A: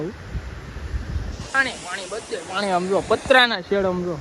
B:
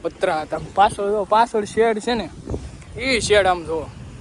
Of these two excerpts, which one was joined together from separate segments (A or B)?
A